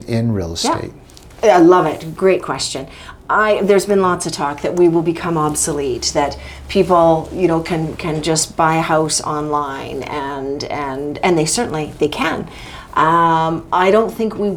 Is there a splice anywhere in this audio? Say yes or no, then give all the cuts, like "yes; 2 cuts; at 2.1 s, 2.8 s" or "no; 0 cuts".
no; 0 cuts